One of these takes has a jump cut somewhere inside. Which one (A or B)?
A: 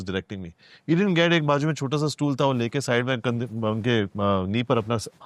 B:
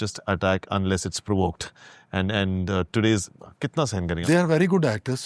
B